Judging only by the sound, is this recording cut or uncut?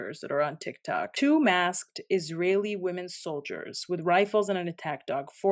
uncut